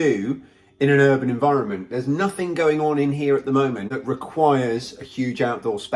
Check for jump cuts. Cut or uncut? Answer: cut